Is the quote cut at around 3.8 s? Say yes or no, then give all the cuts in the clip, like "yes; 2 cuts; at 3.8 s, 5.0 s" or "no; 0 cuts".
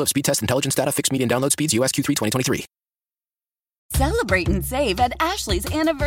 yes; 1 cut; at 3.8 s